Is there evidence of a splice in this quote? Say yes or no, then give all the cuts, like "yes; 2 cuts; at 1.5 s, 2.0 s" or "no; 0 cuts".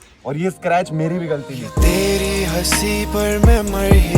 yes; 1 cut; at 1.7 s